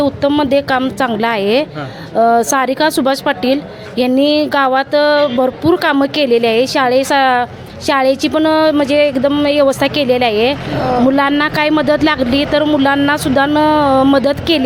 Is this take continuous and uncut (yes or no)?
yes